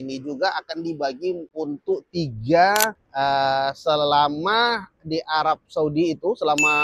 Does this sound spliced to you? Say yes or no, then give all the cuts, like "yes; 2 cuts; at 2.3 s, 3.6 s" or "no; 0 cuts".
yes; 1 cut; at 2.9 s